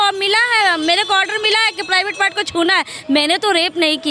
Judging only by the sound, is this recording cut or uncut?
uncut